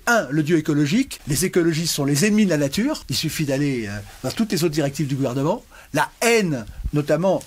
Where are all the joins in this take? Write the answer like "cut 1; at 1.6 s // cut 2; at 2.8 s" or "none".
cut 1; at 1.2 s // cut 2; at 3.1 s